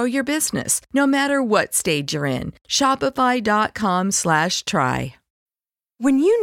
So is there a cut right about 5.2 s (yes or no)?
yes